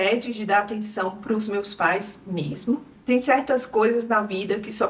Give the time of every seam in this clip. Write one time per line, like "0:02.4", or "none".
none